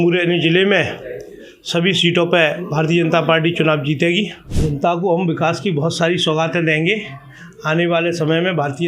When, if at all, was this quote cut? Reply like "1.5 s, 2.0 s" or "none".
4.4 s